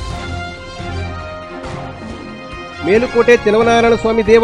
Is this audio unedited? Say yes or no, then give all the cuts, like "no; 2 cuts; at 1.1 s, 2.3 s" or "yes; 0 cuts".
no; 1 cut; at 2.1 s